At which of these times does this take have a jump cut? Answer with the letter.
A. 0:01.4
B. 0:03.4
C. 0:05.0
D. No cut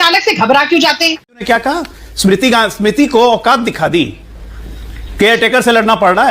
A